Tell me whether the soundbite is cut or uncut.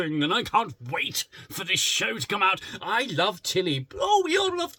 uncut